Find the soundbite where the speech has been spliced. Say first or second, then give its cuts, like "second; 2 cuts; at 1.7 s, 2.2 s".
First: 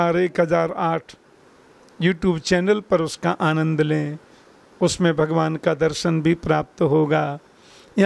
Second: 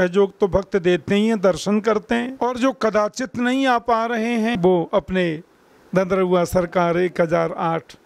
second; 2 cuts; at 2.3 s, 4.6 s